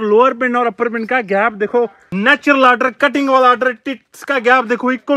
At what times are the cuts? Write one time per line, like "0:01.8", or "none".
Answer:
0:02.0